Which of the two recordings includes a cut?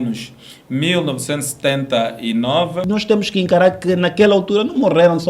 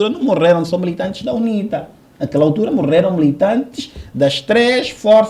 first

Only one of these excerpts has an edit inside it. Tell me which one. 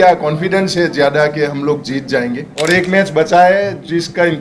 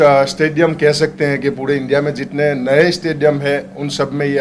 first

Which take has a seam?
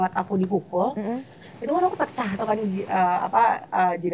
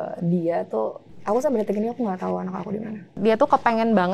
second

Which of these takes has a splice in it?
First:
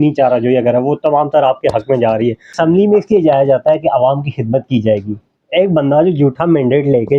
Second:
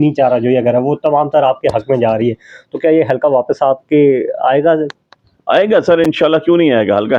first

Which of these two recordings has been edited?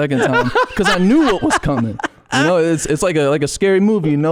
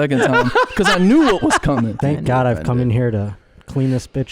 second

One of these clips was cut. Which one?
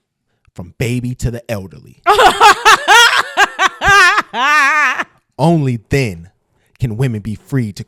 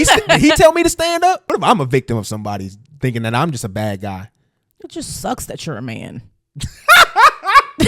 second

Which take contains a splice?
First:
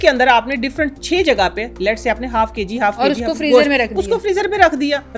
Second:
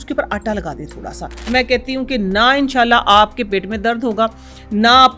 second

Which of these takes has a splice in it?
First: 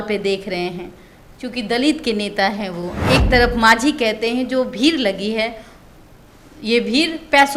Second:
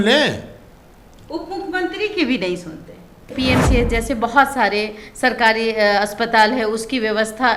second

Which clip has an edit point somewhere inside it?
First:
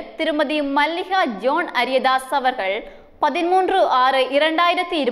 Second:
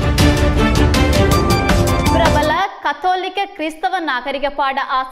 second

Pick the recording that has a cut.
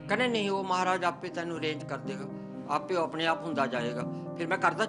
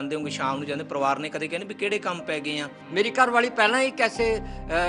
second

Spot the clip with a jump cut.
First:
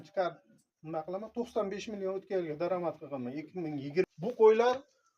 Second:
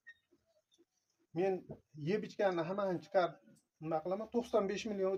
first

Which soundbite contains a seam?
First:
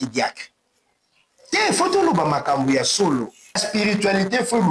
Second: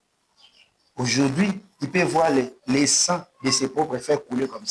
first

